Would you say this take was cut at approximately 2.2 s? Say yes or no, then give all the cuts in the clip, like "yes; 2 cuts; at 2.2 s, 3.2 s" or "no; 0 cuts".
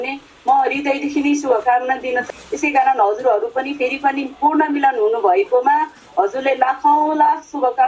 yes; 1 cut; at 2.2 s